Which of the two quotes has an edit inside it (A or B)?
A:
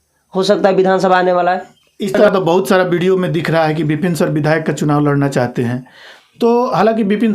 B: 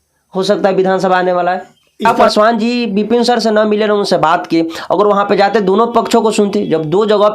B